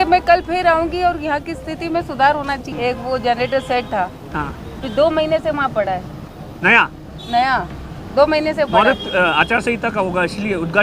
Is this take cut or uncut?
cut